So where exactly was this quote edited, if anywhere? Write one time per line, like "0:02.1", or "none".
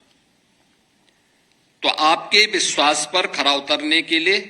0:02.7